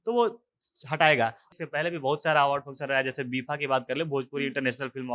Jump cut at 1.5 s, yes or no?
yes